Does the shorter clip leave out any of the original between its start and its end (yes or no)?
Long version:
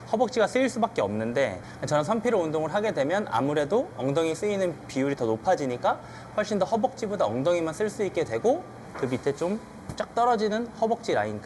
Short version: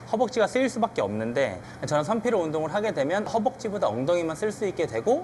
yes